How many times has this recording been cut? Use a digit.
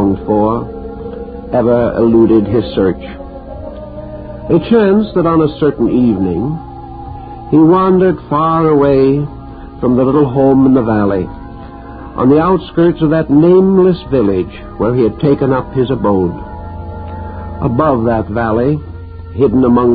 1